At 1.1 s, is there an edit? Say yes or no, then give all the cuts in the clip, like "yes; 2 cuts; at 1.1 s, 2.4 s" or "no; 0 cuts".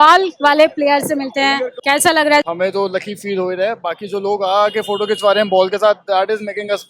no; 1 cut; at 2.5 s